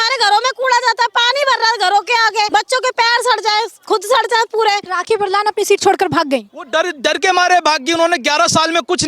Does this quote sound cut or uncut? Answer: cut